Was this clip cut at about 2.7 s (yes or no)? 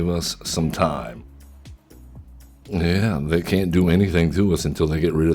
yes